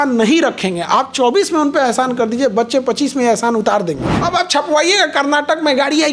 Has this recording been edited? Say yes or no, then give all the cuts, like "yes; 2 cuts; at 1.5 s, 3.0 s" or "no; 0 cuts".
yes; 1 cut; at 4.2 s